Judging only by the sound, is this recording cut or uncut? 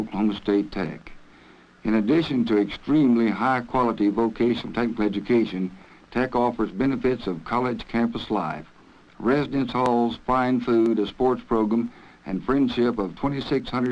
cut